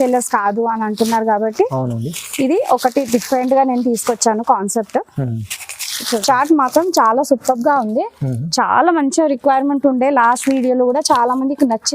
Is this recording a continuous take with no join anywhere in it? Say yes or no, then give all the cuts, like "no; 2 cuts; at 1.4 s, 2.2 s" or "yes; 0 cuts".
no; 1 cut; at 6.0 s